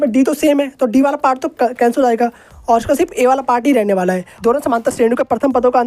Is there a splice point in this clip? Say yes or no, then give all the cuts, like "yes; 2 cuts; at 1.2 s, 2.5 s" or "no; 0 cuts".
yes; 1 cut; at 4.4 s